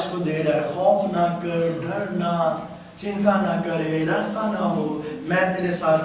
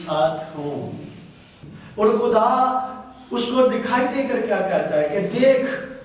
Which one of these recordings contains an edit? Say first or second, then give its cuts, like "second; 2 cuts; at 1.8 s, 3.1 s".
second; 1 cut; at 1.5 s